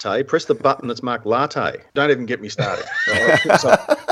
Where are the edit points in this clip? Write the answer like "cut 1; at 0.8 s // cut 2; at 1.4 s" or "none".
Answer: cut 1; at 1.9 s